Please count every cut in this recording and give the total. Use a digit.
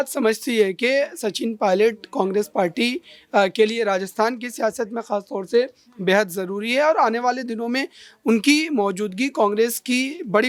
0